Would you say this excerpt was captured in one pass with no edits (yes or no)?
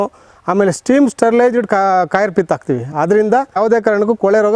no